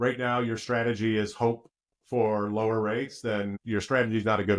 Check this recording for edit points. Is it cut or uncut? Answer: cut